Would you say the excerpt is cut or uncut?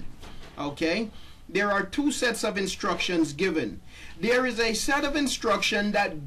uncut